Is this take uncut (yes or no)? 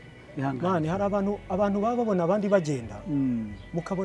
yes